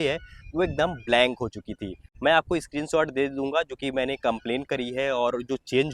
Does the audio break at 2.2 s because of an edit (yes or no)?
no